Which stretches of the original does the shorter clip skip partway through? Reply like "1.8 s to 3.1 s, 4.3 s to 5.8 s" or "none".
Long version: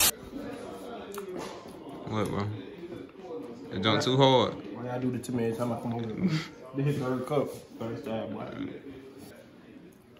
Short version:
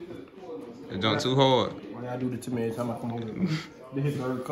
none